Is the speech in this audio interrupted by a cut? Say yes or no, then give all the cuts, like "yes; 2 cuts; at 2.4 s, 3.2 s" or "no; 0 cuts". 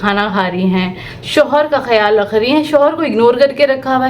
yes; 1 cut; at 1.1 s